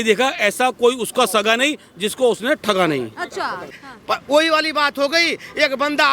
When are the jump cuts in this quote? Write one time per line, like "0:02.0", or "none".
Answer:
0:03.7